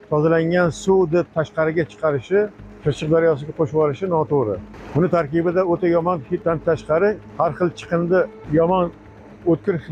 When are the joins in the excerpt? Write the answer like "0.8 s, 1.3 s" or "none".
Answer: 2.7 s, 4.7 s, 6.4 s, 7.3 s, 8.4 s